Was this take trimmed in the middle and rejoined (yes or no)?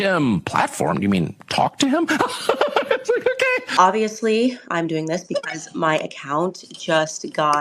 yes